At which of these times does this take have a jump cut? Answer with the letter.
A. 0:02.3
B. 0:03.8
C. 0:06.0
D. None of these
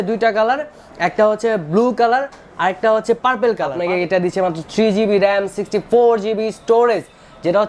B